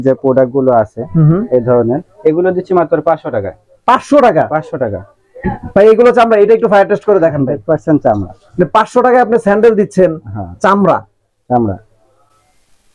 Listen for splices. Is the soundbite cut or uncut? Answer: uncut